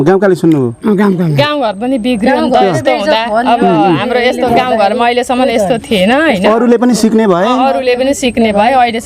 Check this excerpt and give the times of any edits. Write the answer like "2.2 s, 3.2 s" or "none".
1.4 s